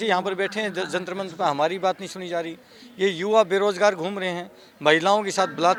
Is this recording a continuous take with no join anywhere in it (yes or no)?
yes